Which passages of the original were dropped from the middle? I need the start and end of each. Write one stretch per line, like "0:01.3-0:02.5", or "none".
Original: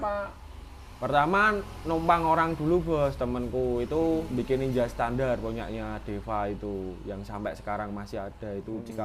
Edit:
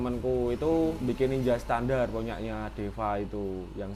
none